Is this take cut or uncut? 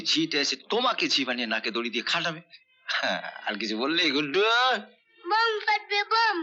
uncut